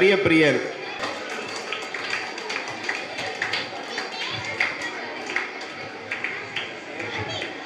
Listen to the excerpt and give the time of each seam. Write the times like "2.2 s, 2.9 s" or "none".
1.0 s

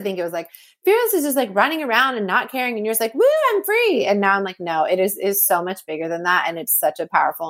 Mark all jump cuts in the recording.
none

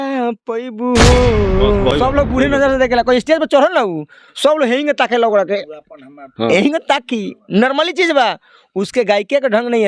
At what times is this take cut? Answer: 1.9 s

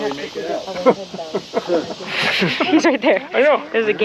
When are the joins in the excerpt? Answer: 2.0 s

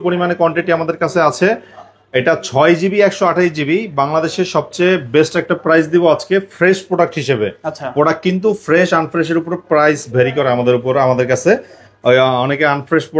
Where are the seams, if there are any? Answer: none

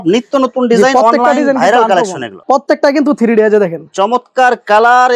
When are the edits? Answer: 2.3 s

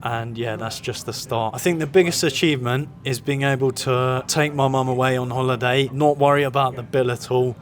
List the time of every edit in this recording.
1.6 s, 4.3 s, 5.9 s

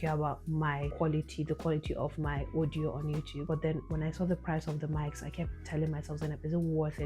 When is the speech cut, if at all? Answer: 0.9 s, 3.4 s

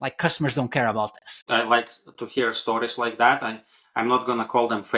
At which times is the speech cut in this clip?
1.4 s

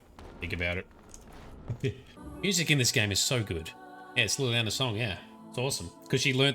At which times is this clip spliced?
2.2 s

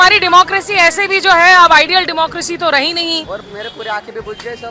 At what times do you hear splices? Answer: 3.3 s

